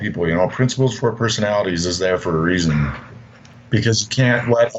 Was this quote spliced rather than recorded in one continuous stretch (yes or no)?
yes